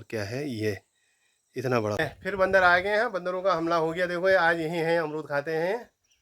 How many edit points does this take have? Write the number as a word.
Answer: one